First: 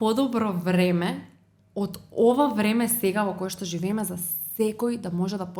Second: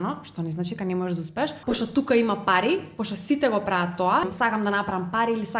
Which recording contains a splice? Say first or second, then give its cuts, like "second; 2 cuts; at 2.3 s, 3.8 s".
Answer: second; 2 cuts; at 1.6 s, 4.2 s